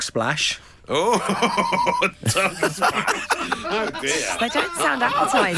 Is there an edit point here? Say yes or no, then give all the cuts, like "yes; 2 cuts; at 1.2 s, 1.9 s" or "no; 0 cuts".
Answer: no; 0 cuts